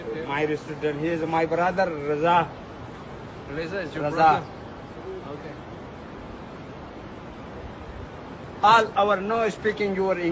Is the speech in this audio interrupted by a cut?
no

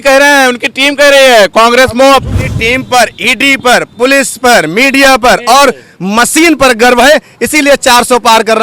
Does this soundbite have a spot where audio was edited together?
yes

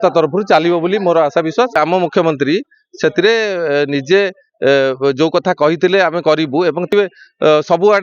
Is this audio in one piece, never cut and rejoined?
no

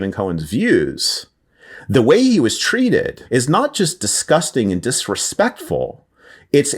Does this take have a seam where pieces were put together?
yes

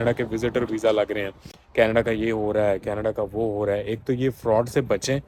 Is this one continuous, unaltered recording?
yes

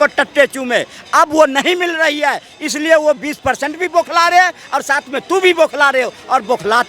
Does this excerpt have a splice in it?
no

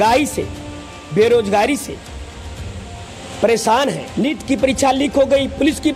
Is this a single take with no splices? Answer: no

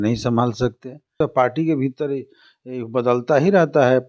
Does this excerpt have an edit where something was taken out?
yes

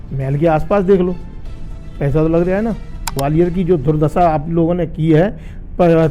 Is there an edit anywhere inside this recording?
yes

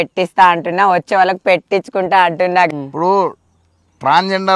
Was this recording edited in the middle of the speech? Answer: yes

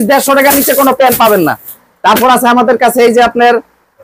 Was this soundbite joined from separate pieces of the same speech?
no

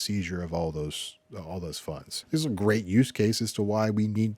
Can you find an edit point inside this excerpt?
yes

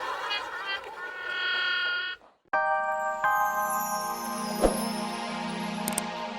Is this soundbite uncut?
no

